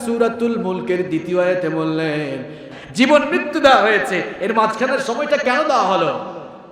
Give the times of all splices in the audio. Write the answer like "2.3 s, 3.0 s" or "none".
2.8 s